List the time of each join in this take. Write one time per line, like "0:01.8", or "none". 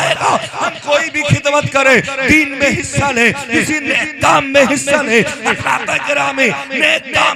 none